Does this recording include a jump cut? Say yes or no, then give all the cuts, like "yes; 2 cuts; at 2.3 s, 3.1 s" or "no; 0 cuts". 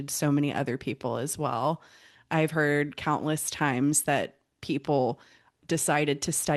no; 0 cuts